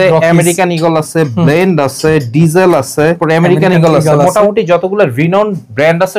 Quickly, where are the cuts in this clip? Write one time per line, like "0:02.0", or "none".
0:03.2